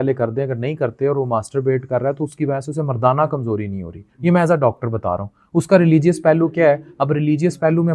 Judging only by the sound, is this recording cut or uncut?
uncut